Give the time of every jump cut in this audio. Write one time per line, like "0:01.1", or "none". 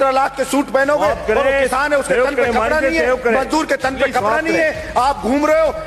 none